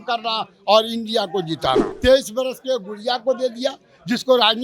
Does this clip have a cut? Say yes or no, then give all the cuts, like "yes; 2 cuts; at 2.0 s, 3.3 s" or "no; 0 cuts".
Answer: yes; 1 cut; at 1.9 s